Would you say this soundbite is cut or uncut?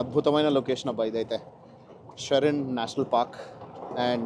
uncut